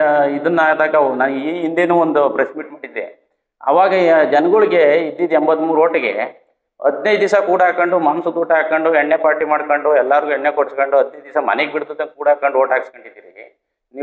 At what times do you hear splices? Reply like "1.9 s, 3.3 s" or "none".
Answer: none